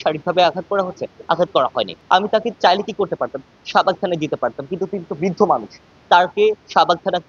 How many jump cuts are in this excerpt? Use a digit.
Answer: 1